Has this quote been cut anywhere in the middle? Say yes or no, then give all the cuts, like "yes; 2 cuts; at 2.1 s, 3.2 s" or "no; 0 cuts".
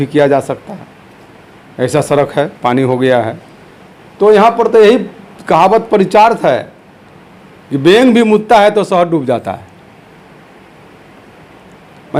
no; 0 cuts